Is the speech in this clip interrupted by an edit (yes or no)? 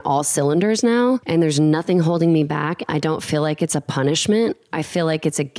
no